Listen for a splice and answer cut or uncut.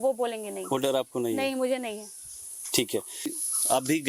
uncut